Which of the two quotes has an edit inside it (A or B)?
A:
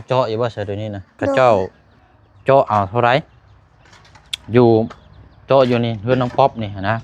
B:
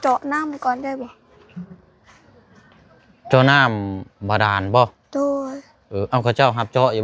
A